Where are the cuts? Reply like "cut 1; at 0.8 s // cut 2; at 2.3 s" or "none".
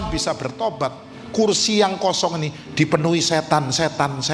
none